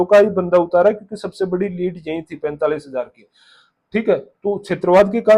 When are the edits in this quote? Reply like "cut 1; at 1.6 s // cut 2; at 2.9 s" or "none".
none